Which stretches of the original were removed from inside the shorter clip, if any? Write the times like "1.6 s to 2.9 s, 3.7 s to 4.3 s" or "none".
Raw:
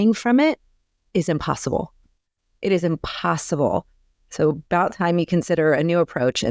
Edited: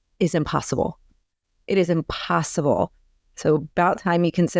none

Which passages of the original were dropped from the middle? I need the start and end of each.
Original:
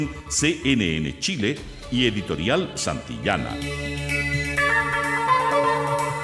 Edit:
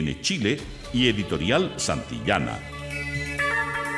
3.6 s to 3.8 s

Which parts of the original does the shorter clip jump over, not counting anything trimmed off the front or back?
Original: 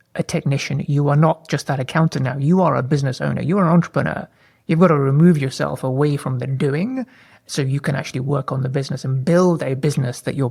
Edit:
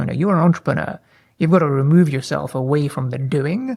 none

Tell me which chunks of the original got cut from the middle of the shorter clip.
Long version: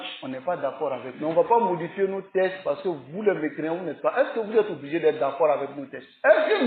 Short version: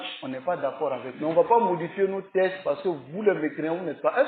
none

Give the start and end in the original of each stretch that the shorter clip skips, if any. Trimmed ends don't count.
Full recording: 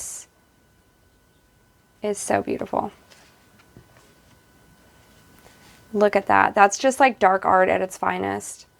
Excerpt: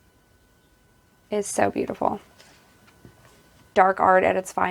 4.4 s to 7.2 s

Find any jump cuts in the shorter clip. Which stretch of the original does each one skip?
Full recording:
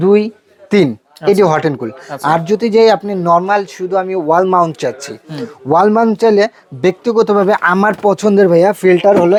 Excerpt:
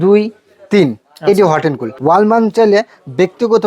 1.9 s to 5.5 s

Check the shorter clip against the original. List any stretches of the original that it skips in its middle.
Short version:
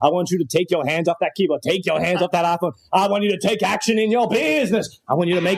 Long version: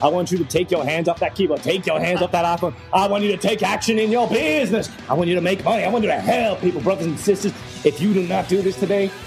none

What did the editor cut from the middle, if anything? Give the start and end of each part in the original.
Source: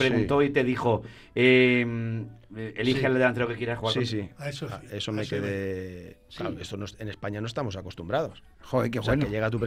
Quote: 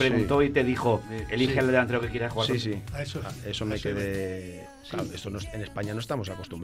1.2 s to 2.6 s

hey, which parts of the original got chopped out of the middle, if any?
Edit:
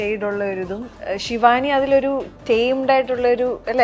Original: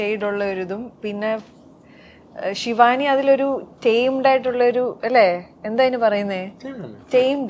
0.9 s to 2.3 s

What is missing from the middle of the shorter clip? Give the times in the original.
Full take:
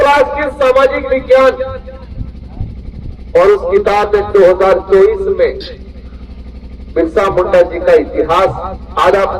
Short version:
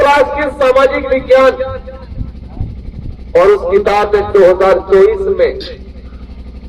none

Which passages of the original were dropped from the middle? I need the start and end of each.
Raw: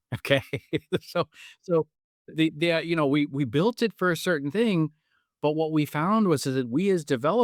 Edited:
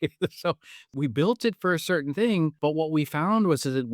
1.6 s to 3.3 s, 4.9 s to 5.4 s

